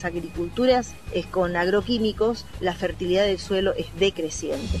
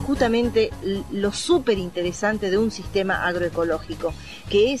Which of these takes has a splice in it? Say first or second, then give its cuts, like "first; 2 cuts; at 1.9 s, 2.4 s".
first; 2 cuts; at 1.0 s, 2.5 s